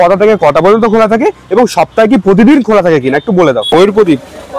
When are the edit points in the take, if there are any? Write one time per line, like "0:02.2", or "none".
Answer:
0:03.7

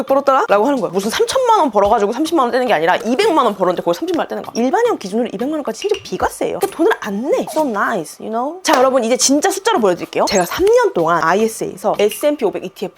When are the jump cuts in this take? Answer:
0:00.9
0:04.5
0:08.6
0:10.3

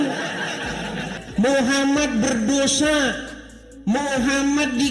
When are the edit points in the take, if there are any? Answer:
0:01.2

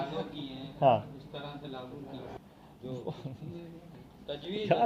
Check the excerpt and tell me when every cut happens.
0:02.4

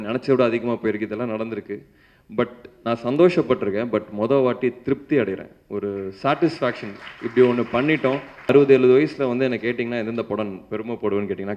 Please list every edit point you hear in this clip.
0:08.5

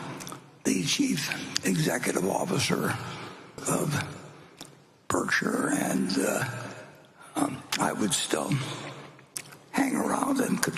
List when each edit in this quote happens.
0:03.6

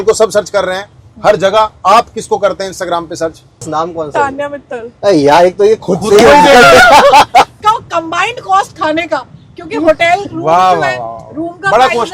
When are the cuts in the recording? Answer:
0:07.6

